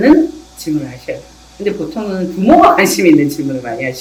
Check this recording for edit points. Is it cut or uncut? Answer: uncut